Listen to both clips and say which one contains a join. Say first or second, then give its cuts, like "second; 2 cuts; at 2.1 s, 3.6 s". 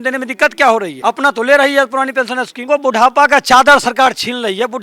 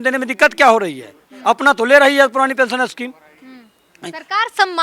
first; 2 cuts; at 0.9 s, 2.6 s